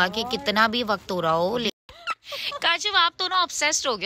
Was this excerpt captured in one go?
no; 1 cut; at 1.7 s

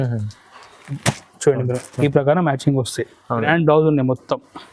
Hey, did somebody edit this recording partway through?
yes; 1 cut; at 3.5 s

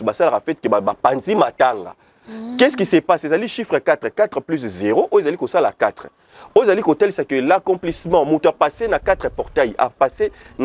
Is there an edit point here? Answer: no; 0 cuts

